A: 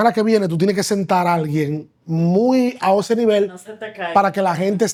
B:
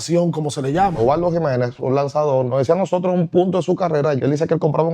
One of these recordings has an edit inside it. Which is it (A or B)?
B